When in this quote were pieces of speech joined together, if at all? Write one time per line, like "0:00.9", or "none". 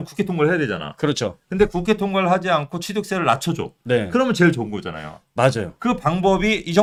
none